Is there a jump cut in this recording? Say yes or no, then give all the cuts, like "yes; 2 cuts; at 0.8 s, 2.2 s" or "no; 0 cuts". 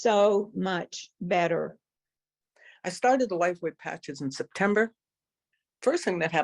no; 0 cuts